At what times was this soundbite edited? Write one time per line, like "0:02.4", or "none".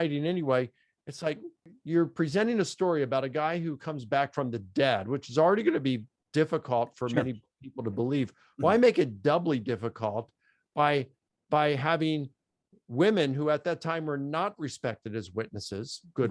0:01.7